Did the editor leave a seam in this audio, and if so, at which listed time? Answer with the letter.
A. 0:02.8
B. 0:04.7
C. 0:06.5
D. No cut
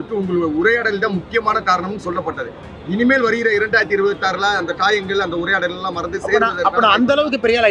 D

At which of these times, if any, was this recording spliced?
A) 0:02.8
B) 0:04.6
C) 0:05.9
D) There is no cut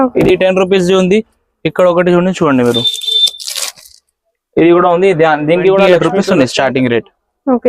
C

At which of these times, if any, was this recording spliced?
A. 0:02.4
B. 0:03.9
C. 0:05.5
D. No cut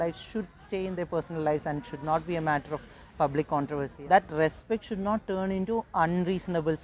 B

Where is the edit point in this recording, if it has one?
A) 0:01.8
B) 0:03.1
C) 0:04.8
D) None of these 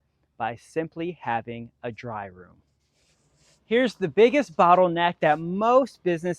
D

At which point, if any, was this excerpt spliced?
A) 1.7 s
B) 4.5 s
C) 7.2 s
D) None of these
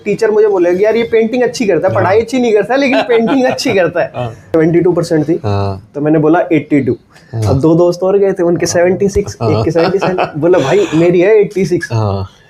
B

